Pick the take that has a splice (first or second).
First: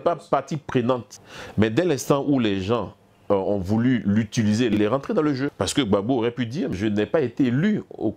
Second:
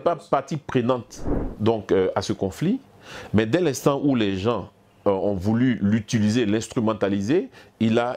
first